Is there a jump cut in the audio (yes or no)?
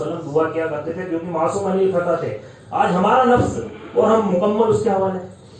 no